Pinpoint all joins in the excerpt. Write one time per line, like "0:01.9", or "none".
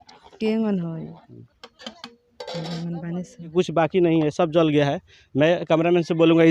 0:03.5